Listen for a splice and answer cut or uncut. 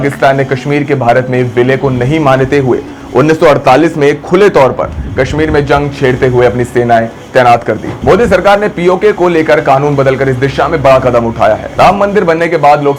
cut